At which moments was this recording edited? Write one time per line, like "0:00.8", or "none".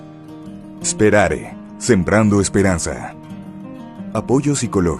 0:02.2